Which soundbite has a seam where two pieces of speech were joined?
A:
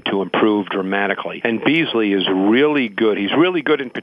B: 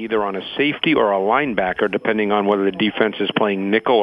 A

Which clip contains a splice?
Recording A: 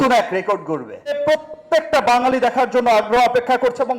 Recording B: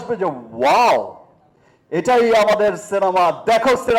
A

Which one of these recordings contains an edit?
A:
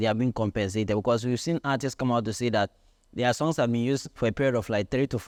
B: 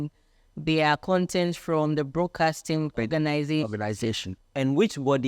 B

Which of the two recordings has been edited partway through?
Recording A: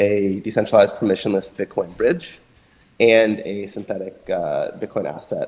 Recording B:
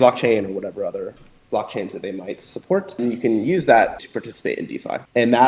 B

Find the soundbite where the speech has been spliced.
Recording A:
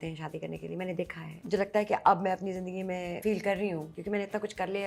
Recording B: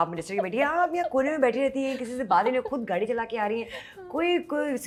A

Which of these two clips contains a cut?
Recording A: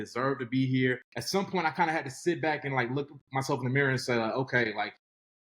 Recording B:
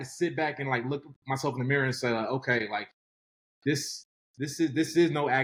A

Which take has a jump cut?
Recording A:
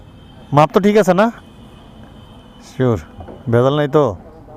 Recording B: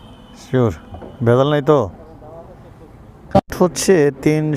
B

